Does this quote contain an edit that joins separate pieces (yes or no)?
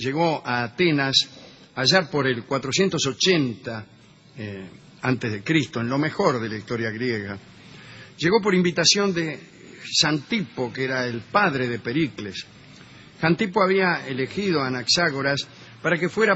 no